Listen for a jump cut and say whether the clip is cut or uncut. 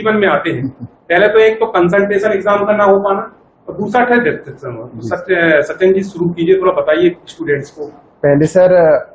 uncut